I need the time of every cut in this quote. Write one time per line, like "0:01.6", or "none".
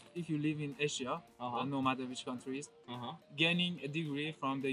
none